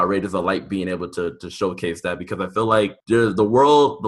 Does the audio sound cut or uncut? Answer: cut